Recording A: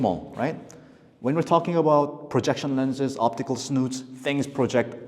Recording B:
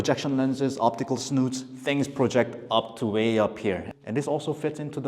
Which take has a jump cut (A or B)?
B